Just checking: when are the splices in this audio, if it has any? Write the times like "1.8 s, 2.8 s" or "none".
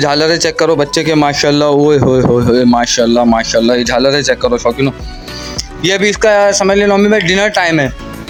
none